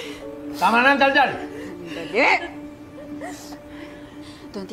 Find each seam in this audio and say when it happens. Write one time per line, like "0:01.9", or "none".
none